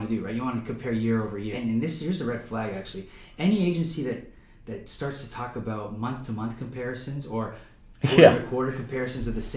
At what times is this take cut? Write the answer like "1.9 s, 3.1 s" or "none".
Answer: 1.6 s